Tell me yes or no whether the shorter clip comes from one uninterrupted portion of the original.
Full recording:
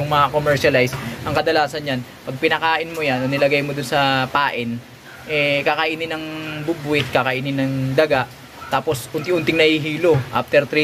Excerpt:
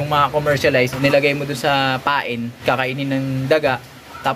no